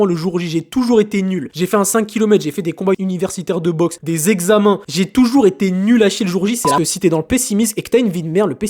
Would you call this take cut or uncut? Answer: cut